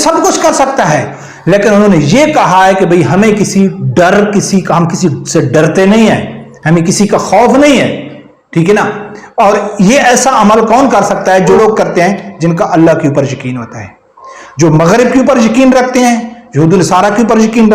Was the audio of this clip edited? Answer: yes; 1 cut; at 11.6 s

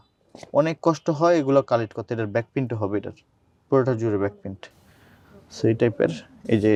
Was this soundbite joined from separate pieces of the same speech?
no; 0 cuts

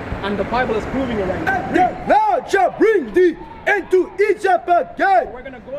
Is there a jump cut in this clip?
yes; 1 cut; at 1.5 s

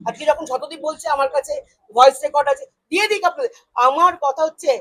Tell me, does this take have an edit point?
no; 0 cuts

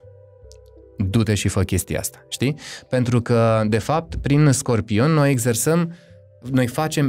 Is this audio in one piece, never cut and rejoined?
yes; 0 cuts

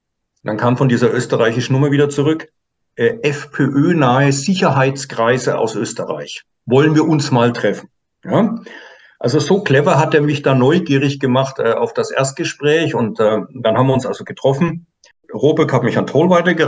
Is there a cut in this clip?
yes; 1 cut; at 15.2 s

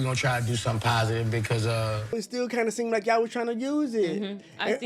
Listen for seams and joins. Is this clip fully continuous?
no; 1 cut; at 2.2 s

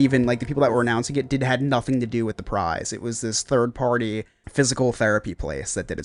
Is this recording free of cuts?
yes; 0 cuts

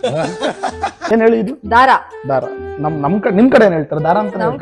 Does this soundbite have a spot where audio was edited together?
yes; 1 cut; at 1.0 s

